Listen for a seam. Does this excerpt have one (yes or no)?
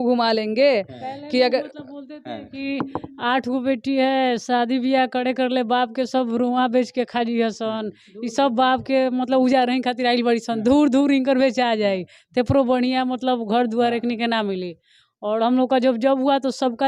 no